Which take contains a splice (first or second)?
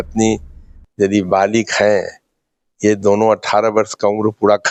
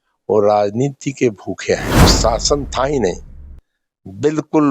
second